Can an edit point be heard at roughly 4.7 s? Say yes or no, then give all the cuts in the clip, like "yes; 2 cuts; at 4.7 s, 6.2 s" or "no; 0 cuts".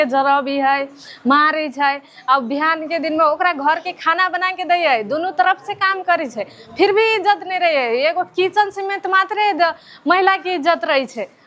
no; 0 cuts